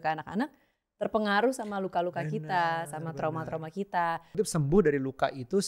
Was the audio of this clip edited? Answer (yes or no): yes